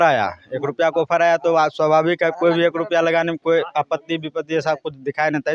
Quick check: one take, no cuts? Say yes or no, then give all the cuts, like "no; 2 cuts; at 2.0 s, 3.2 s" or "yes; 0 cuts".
yes; 0 cuts